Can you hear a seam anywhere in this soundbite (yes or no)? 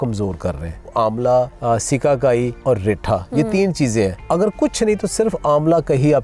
yes